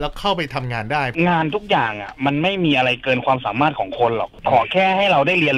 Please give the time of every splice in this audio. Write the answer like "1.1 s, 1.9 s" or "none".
1.1 s